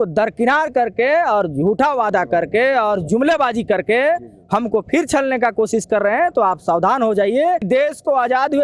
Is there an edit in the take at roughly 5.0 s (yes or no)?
no